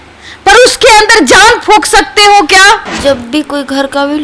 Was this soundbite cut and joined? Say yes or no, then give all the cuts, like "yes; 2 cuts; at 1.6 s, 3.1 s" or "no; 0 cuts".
yes; 1 cut; at 2.8 s